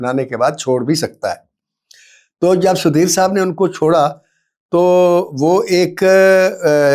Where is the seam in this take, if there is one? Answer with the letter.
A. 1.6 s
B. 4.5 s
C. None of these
C